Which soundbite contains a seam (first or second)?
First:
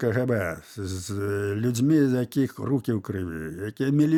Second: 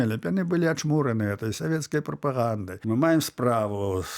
second